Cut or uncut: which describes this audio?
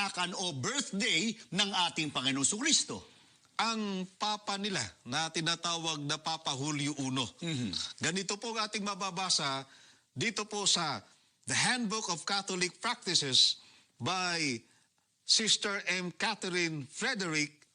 cut